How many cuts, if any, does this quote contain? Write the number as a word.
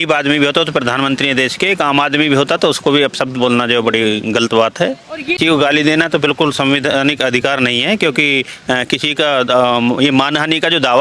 one